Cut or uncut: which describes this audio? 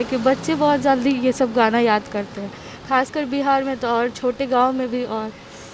uncut